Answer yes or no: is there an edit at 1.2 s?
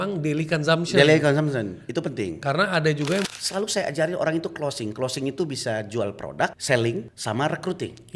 no